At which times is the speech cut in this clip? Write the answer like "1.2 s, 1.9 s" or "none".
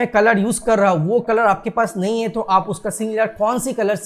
none